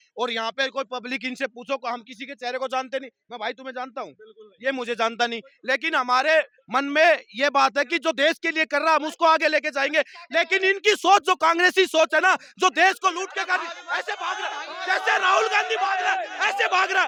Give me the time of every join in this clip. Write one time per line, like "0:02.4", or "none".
none